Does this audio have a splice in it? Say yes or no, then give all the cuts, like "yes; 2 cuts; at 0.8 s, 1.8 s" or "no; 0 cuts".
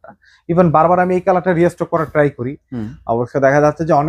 no; 0 cuts